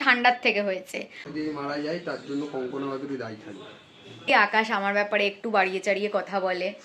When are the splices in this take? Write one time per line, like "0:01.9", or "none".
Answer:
0:01.2
0:04.3